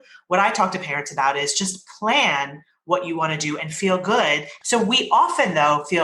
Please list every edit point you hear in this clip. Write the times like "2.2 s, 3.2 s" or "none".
4.5 s